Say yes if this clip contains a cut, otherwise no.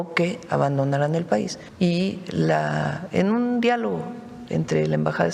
yes